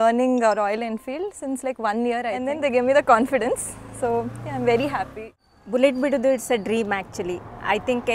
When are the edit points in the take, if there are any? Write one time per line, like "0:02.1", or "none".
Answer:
0:02.4
0:05.2

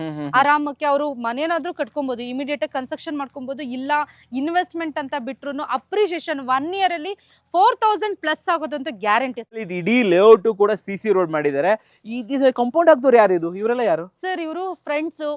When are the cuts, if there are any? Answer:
0:09.6

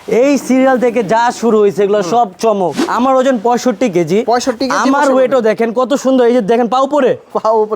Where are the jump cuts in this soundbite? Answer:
0:02.8

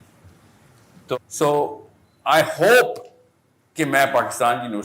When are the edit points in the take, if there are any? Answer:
0:01.2

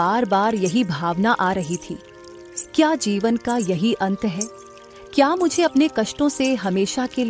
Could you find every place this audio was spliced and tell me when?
none

